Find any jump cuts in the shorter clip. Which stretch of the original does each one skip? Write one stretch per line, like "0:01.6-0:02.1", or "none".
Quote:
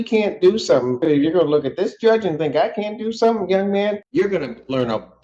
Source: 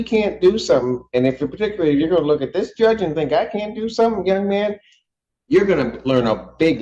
0:01.0-0:01.8
0:04.8-0:05.4